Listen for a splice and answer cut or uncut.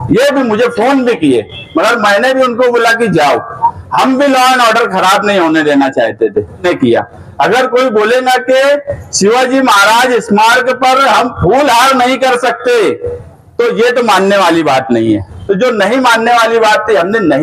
cut